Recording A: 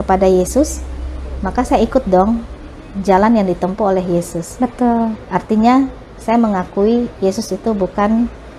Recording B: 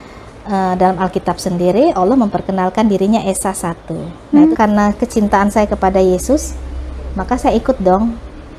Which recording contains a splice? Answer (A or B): B